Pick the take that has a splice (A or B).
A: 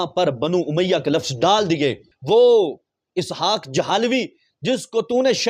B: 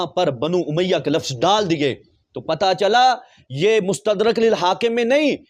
A